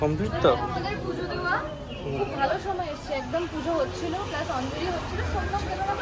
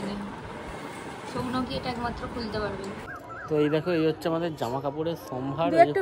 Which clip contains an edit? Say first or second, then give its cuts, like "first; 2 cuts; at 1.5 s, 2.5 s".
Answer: second; 1 cut; at 3.1 s